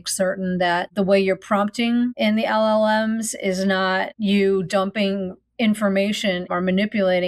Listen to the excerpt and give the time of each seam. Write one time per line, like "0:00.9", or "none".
0:00.9
0:02.1
0:04.1
0:06.4